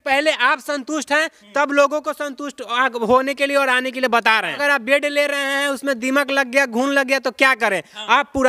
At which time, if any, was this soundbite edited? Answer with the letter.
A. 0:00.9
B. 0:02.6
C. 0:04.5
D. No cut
C